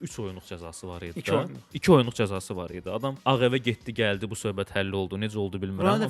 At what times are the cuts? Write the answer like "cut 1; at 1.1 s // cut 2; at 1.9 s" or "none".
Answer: cut 1; at 3.2 s